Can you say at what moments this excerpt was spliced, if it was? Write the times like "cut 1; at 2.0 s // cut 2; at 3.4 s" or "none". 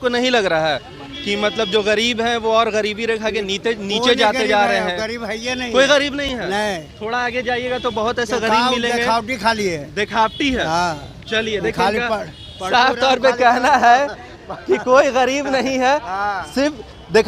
none